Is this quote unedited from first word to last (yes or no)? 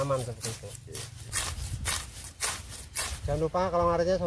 no